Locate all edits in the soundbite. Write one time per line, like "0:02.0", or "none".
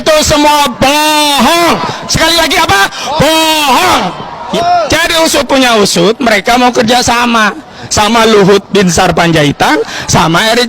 0:04.4

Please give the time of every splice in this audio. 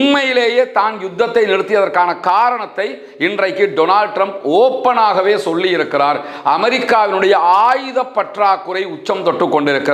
none

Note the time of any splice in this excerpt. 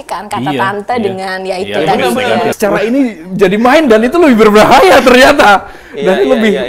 0:02.5

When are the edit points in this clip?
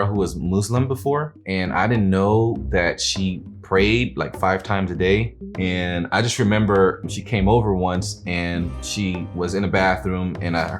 0:01.4
0:02.6
0:05.4
0:07.0
0:08.9

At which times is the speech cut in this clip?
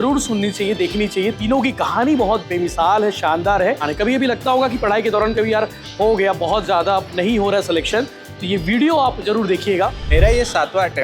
0:03.9
0:10.0

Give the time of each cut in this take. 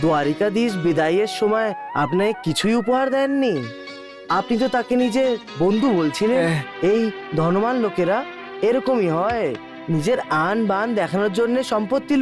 0:06.4

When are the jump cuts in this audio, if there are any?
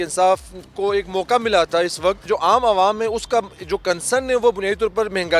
0:02.3

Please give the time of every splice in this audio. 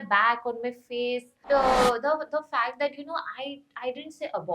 0:01.4

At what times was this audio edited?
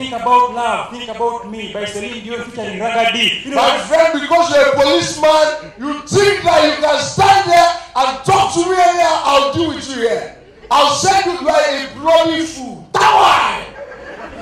0:03.4

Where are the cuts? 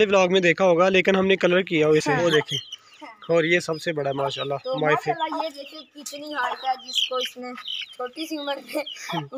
0:02.2

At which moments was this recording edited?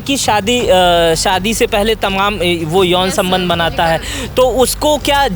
none

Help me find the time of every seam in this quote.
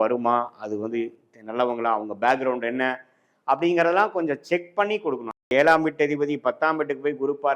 0:05.5

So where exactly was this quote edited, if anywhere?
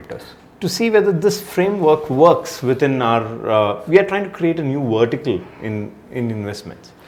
none

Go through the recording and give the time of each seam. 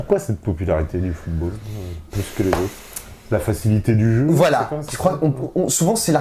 none

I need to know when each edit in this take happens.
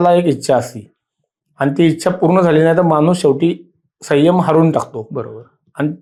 none

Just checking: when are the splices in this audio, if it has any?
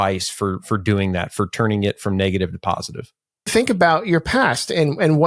0:03.5

